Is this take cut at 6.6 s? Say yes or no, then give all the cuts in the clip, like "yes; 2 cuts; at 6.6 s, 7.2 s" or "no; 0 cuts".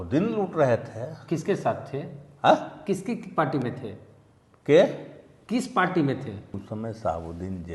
yes; 1 cut; at 6.6 s